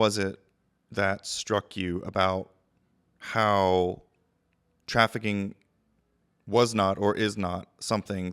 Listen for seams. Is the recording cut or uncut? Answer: uncut